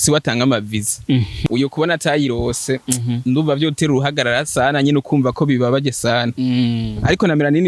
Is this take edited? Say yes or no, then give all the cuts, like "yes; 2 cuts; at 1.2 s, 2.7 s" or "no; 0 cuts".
yes; 1 cut; at 1.3 s